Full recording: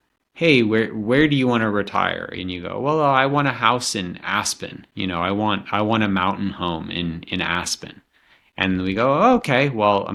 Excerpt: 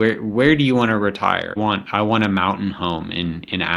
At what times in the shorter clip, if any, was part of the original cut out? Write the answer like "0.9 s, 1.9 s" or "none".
1.5 s